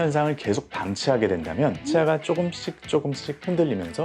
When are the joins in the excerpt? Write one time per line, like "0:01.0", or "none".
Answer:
0:01.8